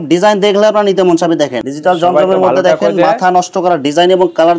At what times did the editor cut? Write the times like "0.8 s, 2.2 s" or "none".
1.6 s

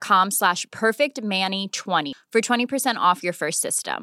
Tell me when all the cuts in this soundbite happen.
2.1 s

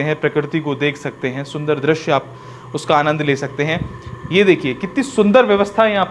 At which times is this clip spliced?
none

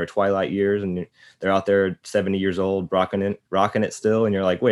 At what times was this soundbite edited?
none

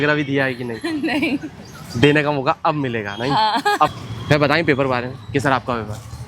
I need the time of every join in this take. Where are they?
4.1 s

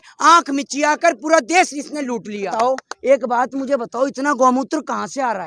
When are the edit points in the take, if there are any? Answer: 2.5 s

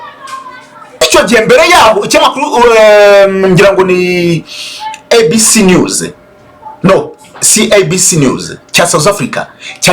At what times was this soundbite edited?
1.0 s

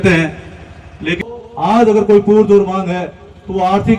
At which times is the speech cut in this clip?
1.2 s

